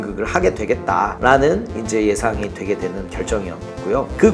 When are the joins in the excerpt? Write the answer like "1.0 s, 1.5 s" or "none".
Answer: none